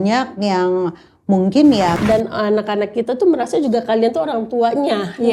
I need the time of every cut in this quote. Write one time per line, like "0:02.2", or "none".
0:02.0